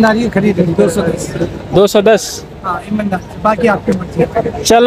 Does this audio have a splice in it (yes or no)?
no